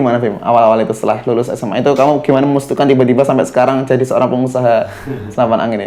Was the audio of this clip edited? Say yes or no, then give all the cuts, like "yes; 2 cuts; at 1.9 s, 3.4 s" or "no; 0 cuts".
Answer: no; 0 cuts